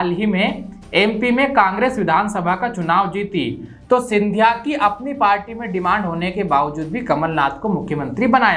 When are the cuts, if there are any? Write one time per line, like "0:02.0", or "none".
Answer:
none